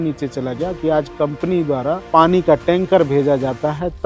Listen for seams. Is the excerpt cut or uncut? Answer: cut